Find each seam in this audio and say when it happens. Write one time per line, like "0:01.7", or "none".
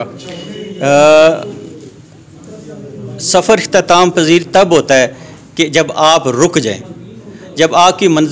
none

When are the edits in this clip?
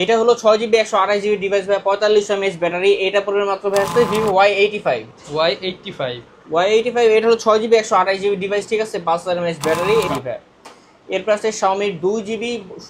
0:03.9
0:10.1

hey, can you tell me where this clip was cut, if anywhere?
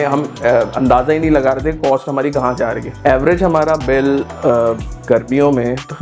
0:02.9

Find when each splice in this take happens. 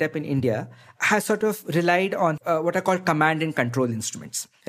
0:02.4

